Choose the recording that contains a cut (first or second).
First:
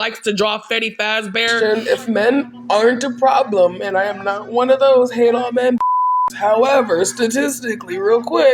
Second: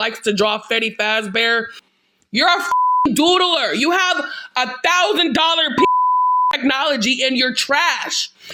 first